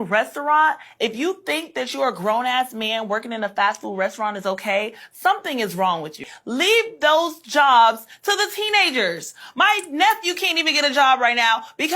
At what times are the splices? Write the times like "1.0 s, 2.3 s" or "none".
6.3 s